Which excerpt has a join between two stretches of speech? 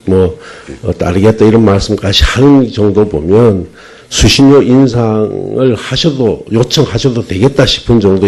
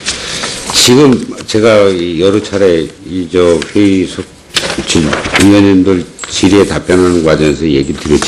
first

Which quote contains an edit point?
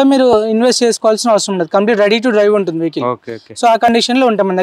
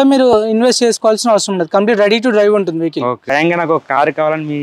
second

